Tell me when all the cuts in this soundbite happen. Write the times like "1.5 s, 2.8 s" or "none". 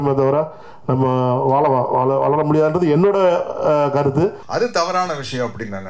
4.4 s